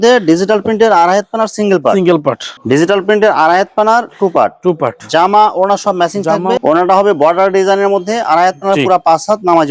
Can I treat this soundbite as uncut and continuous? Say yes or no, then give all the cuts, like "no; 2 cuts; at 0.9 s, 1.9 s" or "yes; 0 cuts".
no; 2 cuts; at 2.5 s, 6.6 s